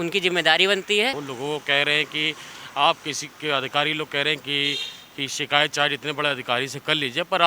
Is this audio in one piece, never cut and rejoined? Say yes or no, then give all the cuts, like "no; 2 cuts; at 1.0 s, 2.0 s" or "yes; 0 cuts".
no; 1 cut; at 1.2 s